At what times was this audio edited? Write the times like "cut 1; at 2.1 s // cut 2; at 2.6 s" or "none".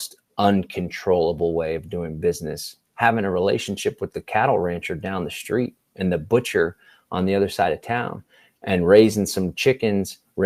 none